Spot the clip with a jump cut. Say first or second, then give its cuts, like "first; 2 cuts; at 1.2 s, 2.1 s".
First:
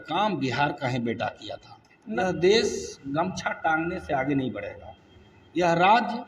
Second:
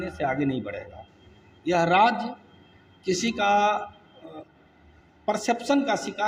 first; 1 cut; at 2.2 s